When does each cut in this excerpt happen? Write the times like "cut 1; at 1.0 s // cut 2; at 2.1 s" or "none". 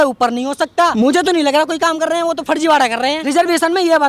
cut 1; at 0.9 s // cut 2; at 3.2 s